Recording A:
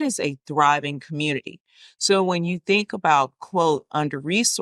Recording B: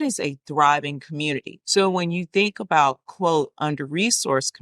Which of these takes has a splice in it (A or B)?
B